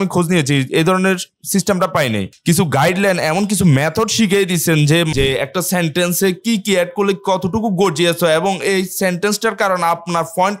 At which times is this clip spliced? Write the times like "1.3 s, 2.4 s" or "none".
2.3 s, 5.1 s